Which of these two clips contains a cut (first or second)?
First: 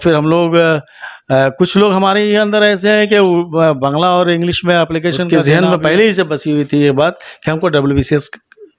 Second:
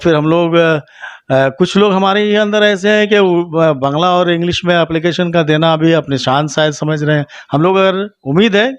first